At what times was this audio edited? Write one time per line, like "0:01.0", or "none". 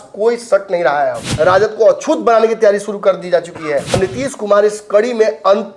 0:01.2
0:03.9

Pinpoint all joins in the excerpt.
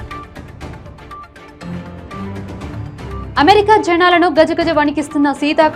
none

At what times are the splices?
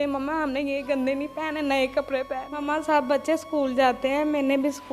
0:02.5

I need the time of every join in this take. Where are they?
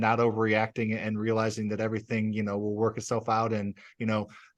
none

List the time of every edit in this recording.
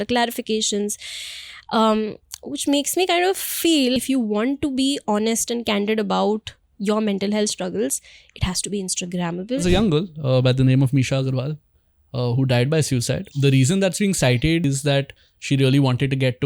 0:04.0
0:09.6
0:13.3
0:14.6

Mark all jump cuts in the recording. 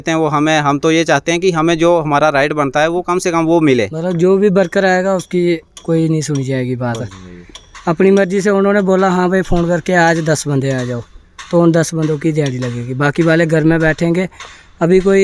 0:04.0

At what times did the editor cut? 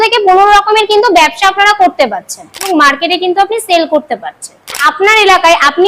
0:02.7
0:04.8

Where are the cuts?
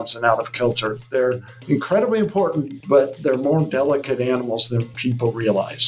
0:02.7
0:04.9

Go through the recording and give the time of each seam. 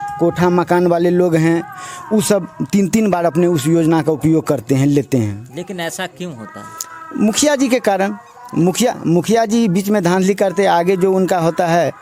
none

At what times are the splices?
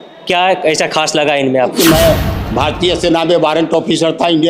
0:01.7

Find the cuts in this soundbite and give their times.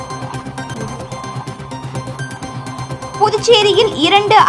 0:01.0

